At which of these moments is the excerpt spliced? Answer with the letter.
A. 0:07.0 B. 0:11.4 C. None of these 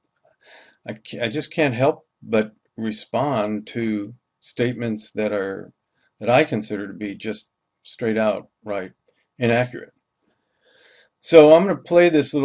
A